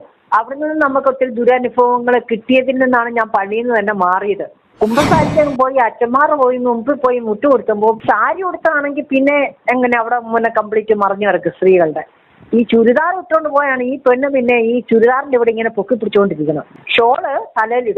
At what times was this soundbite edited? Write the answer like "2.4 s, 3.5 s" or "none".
4.6 s, 8.0 s